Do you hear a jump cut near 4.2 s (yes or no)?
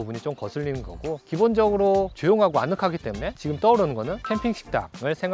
yes